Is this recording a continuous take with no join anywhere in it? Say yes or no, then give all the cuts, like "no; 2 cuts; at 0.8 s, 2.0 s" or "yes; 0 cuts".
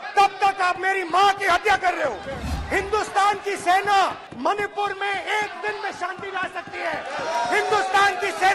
no; 2 cuts; at 2.4 s, 4.3 s